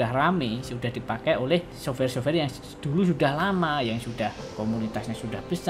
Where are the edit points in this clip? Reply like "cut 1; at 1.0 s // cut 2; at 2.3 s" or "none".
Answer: cut 1; at 1.7 s // cut 2; at 4.4 s